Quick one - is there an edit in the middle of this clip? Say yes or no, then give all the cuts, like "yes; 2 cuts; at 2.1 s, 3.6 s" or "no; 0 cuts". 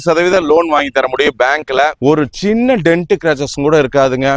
yes; 1 cut; at 1.9 s